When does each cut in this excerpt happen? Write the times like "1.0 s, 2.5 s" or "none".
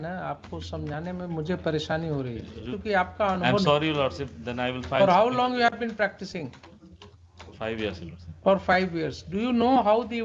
2.7 s